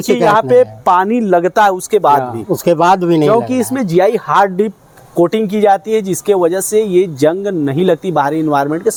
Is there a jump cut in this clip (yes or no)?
no